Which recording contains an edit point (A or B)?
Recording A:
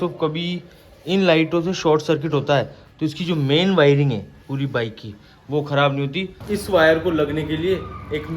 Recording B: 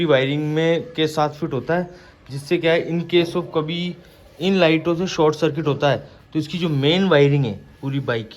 A